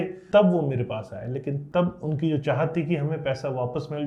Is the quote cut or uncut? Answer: uncut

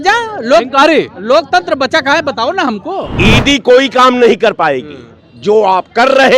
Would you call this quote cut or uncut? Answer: cut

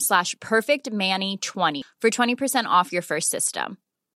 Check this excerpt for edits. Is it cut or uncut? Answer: cut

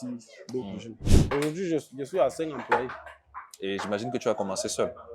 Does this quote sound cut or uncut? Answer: cut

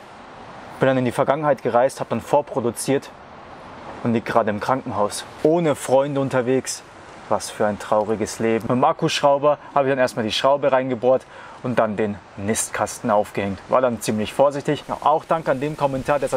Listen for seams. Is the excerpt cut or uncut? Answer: uncut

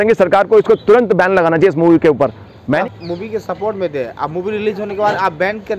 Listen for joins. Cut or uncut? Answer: cut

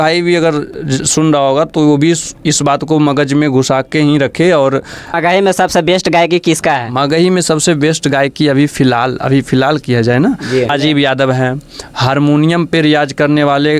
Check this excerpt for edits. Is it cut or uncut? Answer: cut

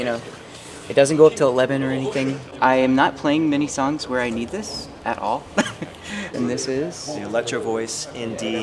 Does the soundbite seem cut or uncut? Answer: cut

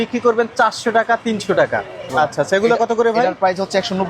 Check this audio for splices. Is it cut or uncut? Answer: cut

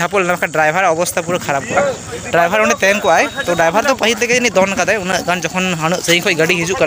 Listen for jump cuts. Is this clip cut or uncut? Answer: uncut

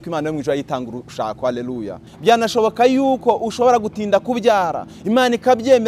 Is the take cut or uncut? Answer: cut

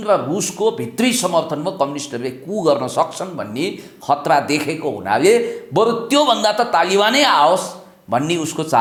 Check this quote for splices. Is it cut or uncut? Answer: uncut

